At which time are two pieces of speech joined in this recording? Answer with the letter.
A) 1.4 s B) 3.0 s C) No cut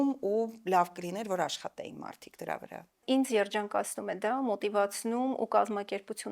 B